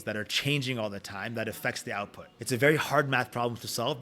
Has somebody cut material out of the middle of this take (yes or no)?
yes